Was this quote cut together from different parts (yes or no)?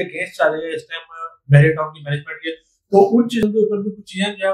yes